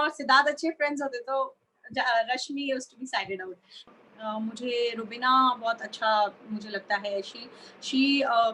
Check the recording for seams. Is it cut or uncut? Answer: cut